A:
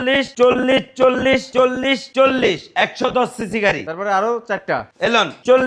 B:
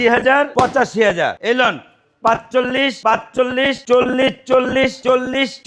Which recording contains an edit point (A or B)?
B